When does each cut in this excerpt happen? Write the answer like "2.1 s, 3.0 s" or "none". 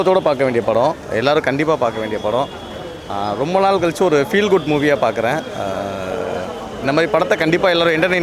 none